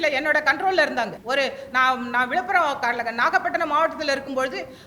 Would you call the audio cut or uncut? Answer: cut